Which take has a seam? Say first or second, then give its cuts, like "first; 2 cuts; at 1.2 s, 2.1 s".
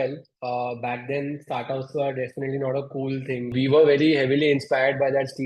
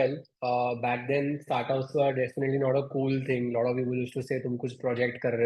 first; 1 cut; at 3.5 s